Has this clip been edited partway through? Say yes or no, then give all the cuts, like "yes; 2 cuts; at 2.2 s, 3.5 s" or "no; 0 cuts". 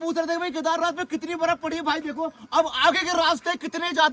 no; 0 cuts